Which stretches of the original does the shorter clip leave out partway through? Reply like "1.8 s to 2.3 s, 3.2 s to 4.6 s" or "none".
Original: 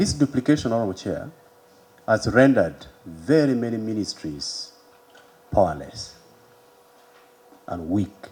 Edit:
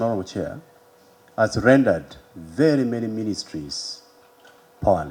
none